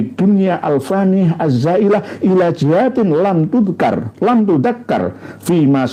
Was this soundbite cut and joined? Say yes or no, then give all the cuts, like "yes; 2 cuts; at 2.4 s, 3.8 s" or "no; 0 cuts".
no; 0 cuts